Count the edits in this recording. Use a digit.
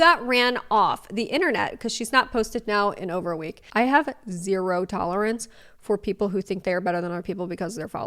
1